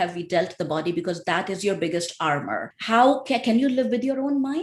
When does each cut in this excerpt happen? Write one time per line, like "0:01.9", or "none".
0:02.7